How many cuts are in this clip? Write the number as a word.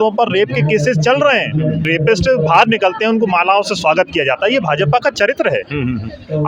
one